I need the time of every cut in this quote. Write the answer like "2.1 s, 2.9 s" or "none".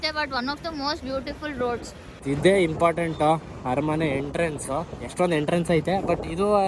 2.1 s